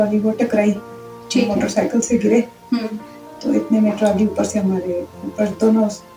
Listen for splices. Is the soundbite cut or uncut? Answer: uncut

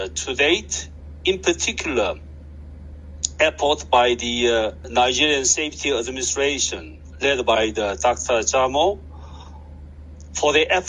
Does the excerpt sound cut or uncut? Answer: cut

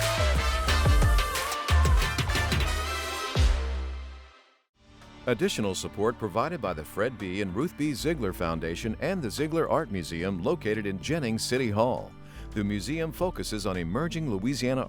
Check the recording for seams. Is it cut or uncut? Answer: cut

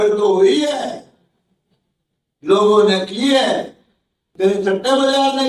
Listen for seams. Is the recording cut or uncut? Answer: uncut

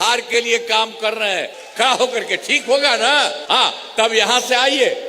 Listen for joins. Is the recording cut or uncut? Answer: cut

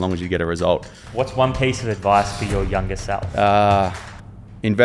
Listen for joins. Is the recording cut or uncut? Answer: cut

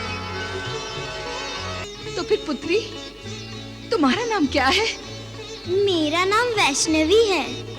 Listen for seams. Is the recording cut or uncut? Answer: cut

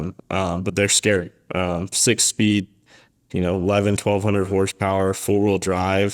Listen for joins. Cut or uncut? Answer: uncut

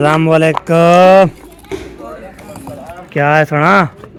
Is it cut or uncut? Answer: uncut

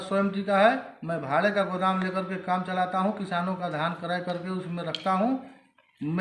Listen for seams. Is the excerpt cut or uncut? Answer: uncut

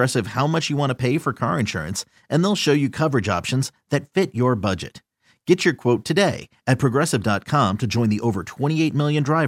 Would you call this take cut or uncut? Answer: uncut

